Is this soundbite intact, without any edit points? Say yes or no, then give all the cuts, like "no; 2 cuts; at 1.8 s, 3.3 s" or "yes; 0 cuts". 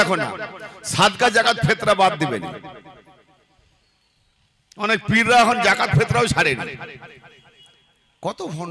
yes; 0 cuts